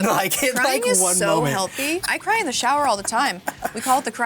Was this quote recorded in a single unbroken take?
no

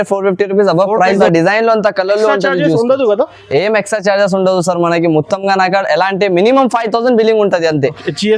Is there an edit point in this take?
yes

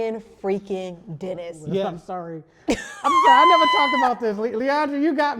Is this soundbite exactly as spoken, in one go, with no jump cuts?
no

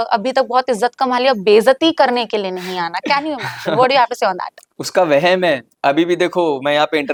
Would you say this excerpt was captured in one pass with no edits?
yes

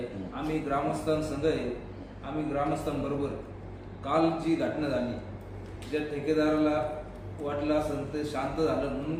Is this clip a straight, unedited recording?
yes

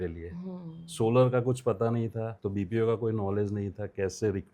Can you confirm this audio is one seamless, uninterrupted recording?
no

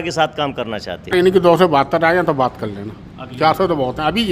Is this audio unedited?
no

